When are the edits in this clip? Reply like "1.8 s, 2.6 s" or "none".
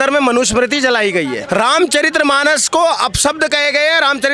1.4 s